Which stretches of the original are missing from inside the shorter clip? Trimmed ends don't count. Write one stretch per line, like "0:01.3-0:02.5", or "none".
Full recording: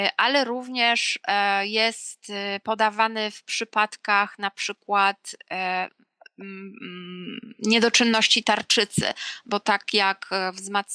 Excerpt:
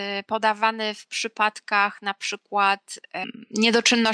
0:05.6-0:07.3